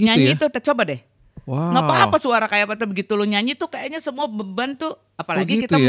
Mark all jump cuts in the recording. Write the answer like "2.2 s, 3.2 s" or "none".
none

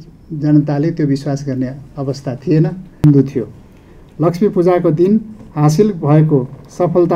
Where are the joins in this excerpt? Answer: 2.8 s

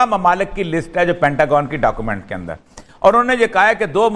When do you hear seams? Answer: none

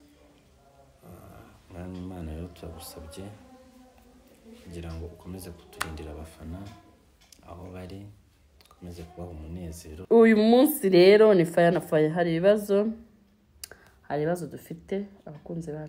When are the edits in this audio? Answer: 10.1 s

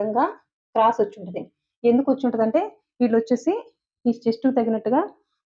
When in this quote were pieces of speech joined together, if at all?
none

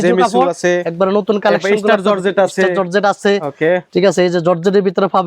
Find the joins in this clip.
3.9 s

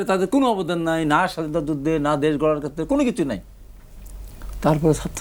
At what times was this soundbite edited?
none

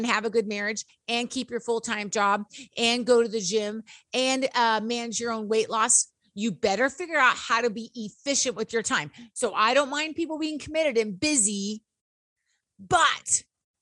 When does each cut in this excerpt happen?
none

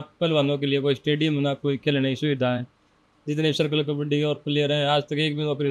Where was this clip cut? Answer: none

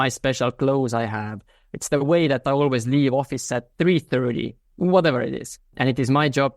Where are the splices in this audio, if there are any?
3.6 s, 4.7 s

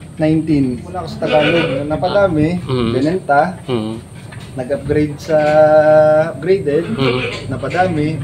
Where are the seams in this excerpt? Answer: 1.0 s, 1.9 s

